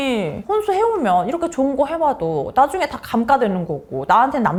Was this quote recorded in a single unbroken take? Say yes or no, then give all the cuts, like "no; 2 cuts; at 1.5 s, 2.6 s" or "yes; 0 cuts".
yes; 0 cuts